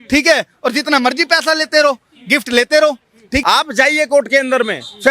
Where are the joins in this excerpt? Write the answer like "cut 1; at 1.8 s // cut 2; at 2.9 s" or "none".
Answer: cut 1; at 3.4 s